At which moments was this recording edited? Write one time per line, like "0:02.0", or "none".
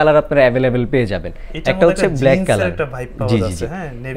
none